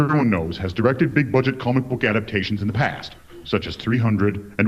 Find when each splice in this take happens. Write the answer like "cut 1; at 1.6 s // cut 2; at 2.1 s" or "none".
cut 1; at 2.6 s